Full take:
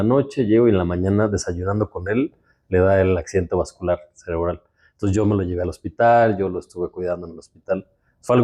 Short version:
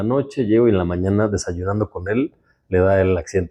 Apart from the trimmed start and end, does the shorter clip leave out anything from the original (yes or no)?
no